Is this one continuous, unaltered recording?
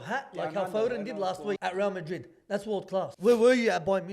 no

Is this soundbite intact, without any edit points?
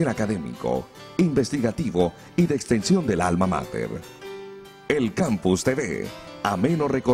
yes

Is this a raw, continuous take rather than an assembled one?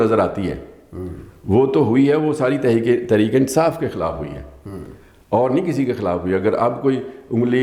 yes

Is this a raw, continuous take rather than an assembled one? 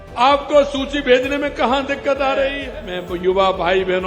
no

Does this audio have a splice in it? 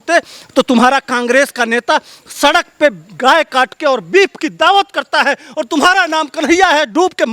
no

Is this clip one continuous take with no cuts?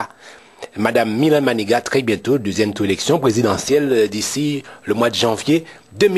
yes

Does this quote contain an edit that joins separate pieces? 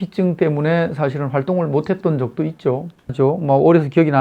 yes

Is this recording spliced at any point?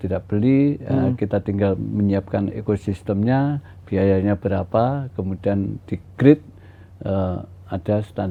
no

